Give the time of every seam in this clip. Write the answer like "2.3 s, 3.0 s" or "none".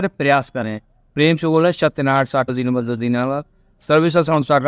2.5 s

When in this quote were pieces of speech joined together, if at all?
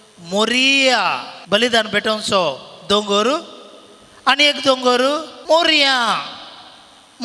1.3 s, 5.3 s

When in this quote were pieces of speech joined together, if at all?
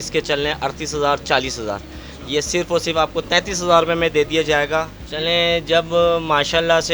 5.1 s

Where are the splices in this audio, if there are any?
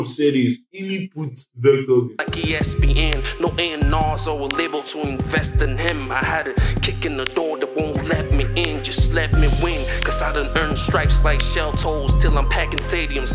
2.2 s

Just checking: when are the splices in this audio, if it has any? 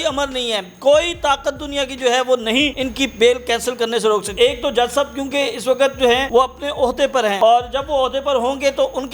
2.8 s, 4.3 s, 6.2 s, 7.4 s

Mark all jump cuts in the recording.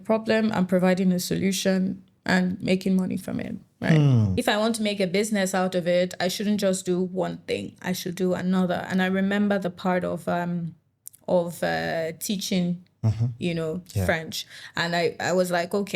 4.3 s

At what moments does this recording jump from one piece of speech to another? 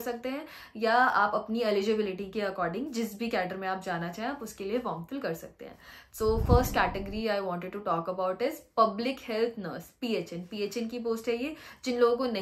none

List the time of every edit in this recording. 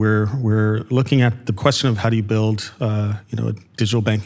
1.6 s

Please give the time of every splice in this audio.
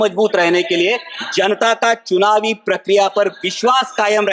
none

